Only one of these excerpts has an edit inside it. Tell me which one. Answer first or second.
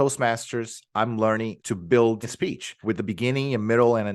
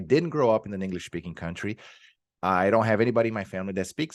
first